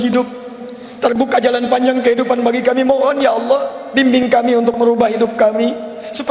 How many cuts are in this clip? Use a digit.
0